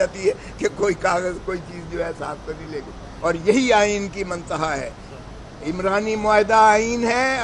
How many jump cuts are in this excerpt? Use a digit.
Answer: 1